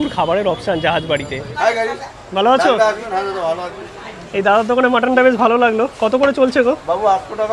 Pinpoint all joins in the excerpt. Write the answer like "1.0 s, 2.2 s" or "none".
1.3 s